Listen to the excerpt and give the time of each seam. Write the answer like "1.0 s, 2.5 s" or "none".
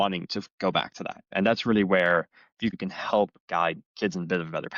1.2 s, 2.7 s, 3.9 s